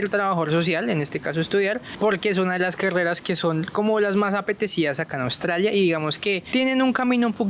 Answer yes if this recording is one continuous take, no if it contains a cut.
no